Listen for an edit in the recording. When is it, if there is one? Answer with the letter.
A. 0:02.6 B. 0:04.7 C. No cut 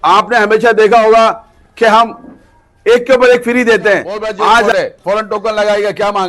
B